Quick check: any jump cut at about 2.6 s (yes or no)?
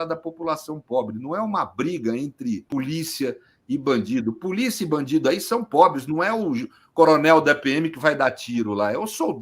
yes